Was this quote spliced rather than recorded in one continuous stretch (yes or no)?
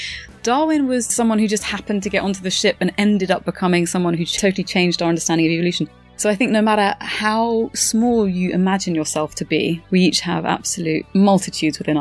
yes